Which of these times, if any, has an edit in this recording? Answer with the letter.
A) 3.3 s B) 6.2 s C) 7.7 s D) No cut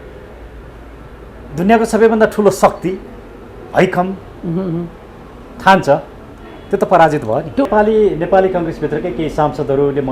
C